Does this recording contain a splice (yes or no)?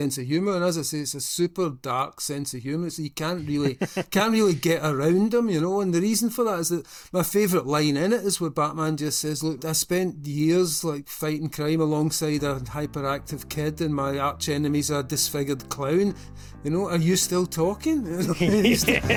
no